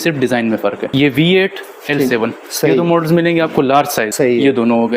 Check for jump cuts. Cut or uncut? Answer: cut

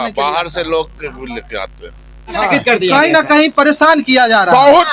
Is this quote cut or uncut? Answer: cut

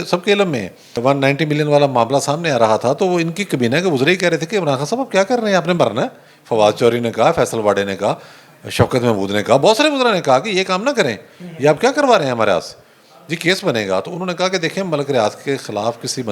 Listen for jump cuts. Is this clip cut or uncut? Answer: cut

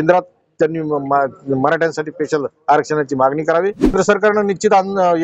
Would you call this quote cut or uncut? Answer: cut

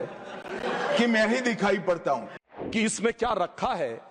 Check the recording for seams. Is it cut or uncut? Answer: cut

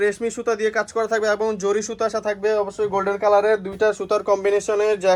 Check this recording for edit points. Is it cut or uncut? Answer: uncut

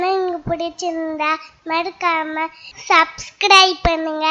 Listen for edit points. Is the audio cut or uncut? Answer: uncut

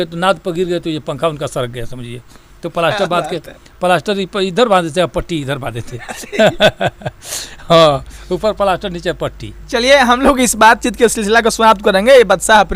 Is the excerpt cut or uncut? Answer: uncut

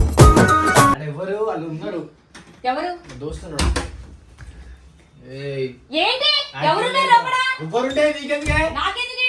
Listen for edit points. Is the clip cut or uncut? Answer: uncut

